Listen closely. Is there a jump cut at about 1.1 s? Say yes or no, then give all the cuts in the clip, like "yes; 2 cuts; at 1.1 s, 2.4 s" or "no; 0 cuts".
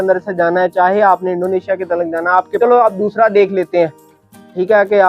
no; 1 cut; at 2.6 s